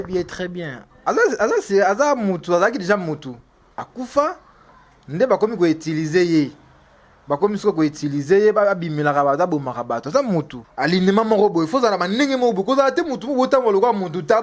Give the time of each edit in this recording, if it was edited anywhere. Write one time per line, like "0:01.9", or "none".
0:10.6

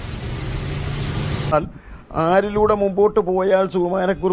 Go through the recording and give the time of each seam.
0:01.5

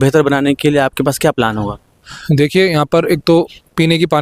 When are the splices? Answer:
none

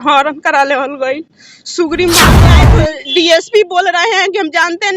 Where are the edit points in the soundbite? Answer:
0:02.6

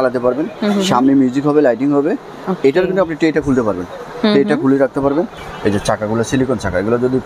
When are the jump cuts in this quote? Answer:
0:05.4

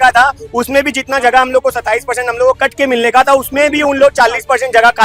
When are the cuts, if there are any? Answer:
none

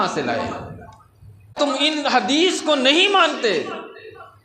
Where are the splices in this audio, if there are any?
0:01.5

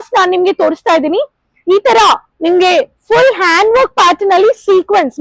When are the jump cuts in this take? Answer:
none

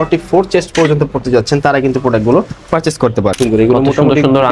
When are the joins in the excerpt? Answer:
0:03.4

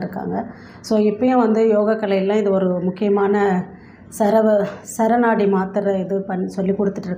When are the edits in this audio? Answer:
none

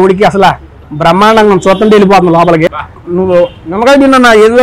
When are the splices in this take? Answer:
0:02.8

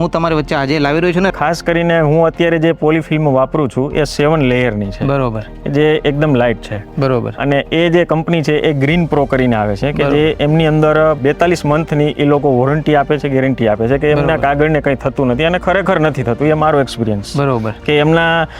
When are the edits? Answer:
0:01.3

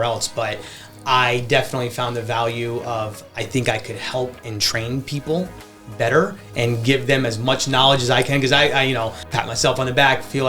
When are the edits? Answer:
0:09.2

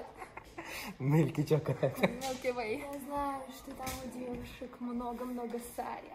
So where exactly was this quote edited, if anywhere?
0:02.9

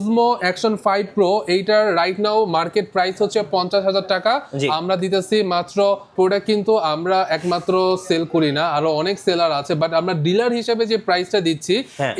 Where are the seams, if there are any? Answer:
0:06.1

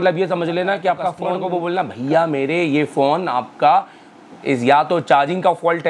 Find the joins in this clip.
0:01.3

